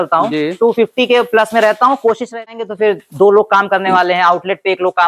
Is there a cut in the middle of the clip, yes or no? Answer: yes